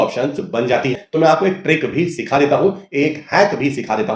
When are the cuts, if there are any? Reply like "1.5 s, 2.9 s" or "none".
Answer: 1.0 s